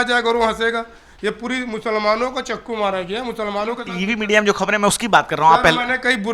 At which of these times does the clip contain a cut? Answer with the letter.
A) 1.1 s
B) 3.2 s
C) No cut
C